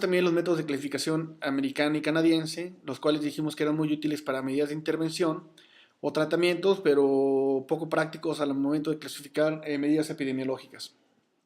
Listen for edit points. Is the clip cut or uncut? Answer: cut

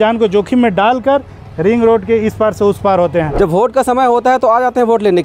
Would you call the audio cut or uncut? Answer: cut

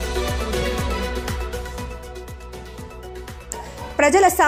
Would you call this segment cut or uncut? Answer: uncut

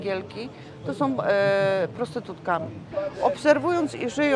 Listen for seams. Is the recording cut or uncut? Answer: cut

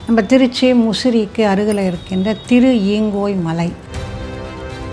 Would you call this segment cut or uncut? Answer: cut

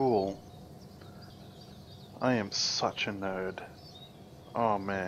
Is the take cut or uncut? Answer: cut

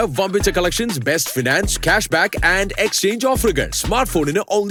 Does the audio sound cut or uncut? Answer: uncut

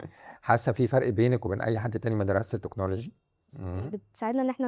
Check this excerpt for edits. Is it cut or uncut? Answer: cut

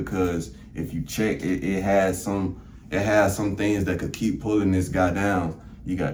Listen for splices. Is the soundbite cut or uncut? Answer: uncut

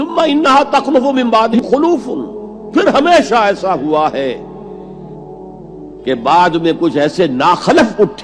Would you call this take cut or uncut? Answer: cut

